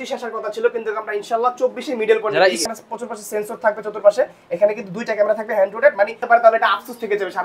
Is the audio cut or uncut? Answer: cut